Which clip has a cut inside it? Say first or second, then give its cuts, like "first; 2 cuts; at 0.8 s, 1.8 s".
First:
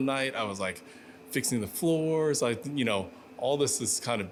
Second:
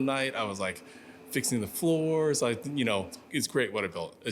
second; 1 cut; at 3.2 s